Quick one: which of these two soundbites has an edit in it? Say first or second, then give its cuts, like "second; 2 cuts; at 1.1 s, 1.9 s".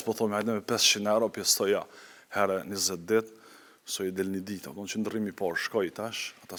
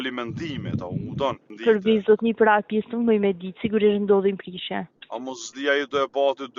second; 1 cut; at 1.5 s